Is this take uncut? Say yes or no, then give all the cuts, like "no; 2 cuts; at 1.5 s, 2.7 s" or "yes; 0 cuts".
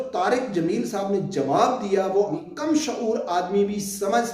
no; 1 cut; at 2.4 s